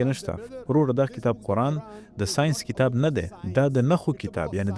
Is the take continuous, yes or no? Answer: yes